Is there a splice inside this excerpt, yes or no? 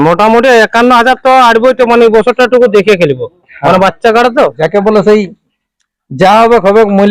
yes